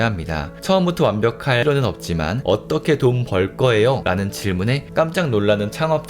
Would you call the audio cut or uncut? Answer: cut